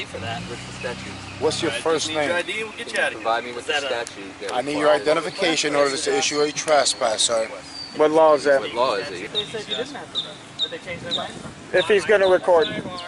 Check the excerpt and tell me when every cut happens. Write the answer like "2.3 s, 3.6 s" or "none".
none

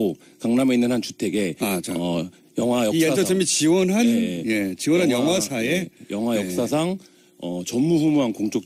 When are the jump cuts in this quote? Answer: none

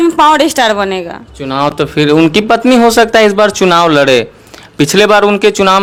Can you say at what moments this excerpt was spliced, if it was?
none

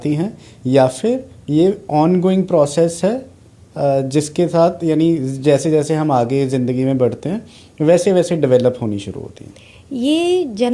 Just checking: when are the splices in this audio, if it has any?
none

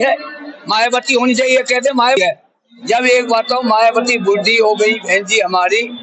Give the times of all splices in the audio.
2.2 s

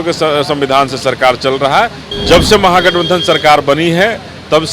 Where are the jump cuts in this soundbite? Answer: 2.0 s

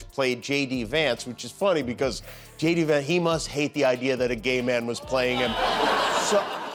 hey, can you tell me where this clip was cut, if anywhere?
none

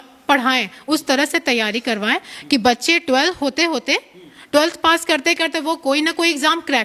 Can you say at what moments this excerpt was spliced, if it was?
none

